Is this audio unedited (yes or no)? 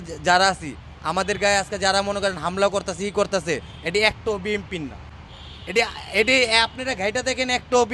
yes